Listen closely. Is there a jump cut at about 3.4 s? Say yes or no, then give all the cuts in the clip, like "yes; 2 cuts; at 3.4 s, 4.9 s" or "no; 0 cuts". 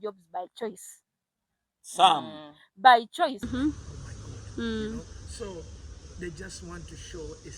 yes; 1 cut; at 3.4 s